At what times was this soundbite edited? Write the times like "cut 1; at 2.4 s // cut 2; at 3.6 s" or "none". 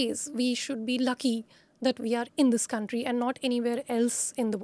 none